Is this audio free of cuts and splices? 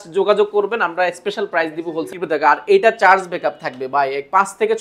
no; 1 cut; at 2.1 s

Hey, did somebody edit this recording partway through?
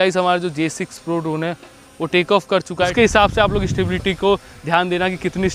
yes; 1 cut; at 2.9 s

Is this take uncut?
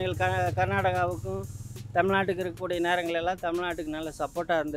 yes; 0 cuts

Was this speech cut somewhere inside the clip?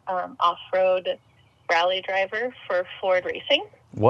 no; 0 cuts

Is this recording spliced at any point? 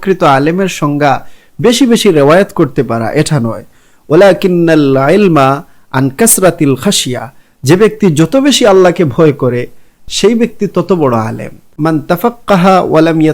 yes; 1 cut; at 11.7 s

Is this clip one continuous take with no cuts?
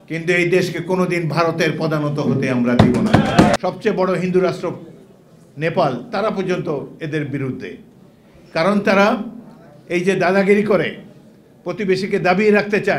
no; 1 cut; at 3.6 s

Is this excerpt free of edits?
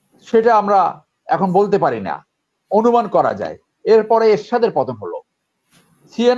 yes; 0 cuts

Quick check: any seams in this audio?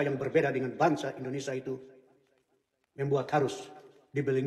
no; 0 cuts

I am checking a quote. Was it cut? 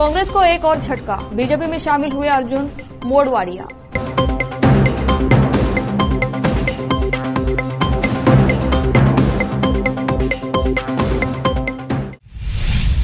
yes; 1 cut; at 12.1 s

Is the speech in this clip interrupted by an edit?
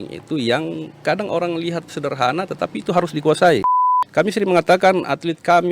yes; 1 cut; at 3.7 s

